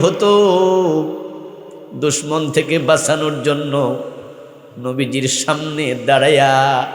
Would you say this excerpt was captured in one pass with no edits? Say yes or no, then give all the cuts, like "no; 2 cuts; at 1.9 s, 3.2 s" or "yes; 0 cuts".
yes; 0 cuts